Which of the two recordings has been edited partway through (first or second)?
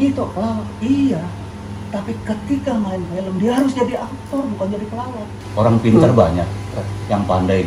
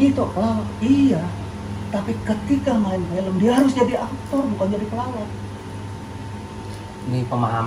first